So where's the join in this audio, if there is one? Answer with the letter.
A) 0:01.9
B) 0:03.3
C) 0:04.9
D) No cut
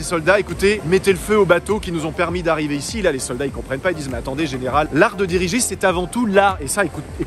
C